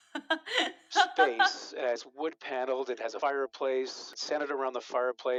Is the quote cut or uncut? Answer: uncut